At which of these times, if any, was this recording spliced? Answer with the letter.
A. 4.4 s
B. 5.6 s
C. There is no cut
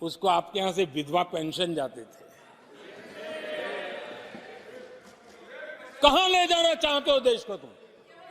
A